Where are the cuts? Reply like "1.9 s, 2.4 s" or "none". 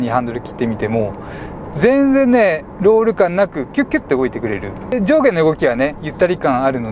4.9 s